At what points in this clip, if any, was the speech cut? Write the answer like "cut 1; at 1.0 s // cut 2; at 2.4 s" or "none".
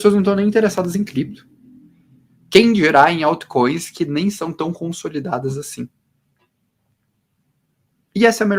none